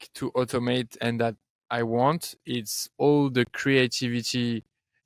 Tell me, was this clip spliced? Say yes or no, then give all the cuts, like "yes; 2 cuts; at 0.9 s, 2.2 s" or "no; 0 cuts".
no; 0 cuts